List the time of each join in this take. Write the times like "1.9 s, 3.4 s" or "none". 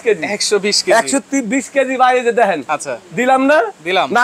2.7 s